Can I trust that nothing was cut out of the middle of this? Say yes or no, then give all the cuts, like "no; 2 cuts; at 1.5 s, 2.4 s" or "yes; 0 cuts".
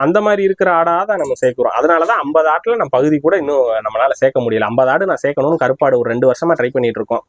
yes; 0 cuts